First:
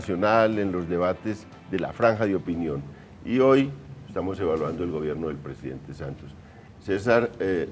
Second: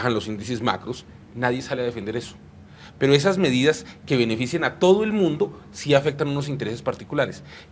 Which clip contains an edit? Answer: first; 1 cut; at 6.0 s

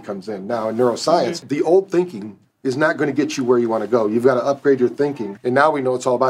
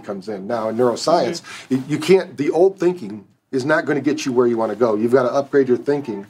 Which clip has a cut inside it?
first; 2 cuts; at 1.4 s, 5.3 s

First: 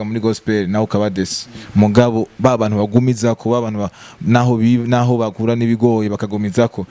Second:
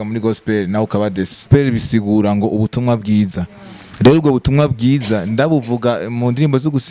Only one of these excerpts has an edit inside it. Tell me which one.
second; 1 cut; at 1.4 s

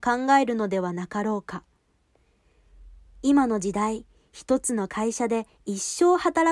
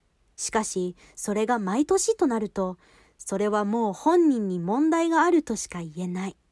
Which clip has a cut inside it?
first; 1 cut; at 2.3 s

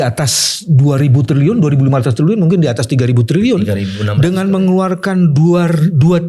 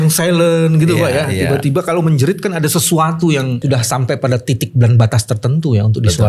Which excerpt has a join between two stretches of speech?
second; 1 cut; at 3.6 s

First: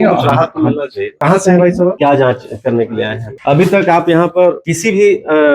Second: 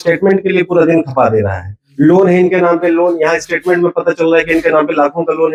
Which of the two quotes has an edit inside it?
first; 4 cuts; at 1.2 s, 2.0 s, 3.2 s, 4.7 s

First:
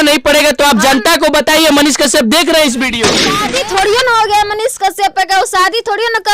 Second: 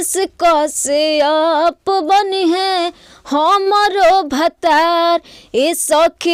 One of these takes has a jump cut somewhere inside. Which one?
first; 1 cut; at 3.3 s

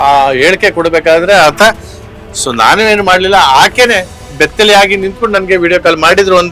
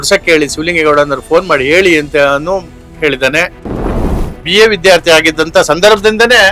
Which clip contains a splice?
second; 1 cut; at 4.2 s

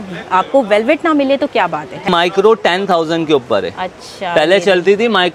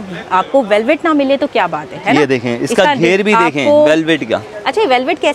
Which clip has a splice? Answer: first; 1 cut; at 2.1 s

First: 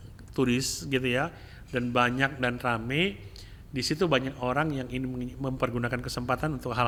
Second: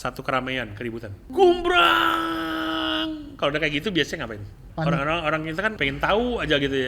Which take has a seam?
second; 3 cuts; at 1.2 s, 4.6 s, 5.8 s

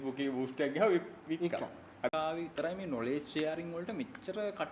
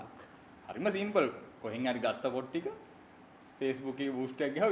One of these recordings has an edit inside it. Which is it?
first; 1 cut; at 2.1 s

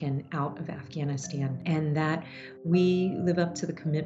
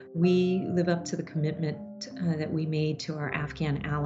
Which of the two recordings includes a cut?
first; 1 cut; at 1.6 s

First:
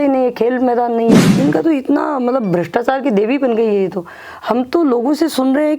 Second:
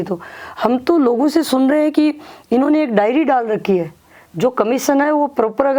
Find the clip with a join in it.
first; 1 cut; at 1.3 s

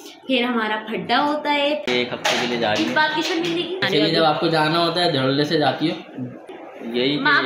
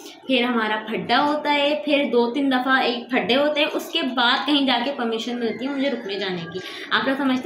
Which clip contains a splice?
first; 3 cuts; at 1.8 s, 3.8 s, 6.4 s

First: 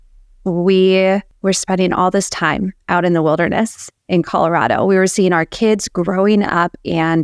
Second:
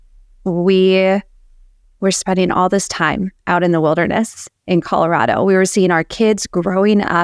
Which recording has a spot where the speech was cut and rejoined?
first; 1 cut; at 1.3 s

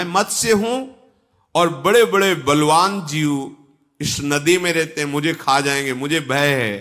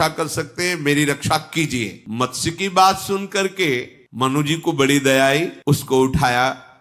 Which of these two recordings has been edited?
second; 3 cuts; at 2.0 s, 4.0 s, 5.6 s

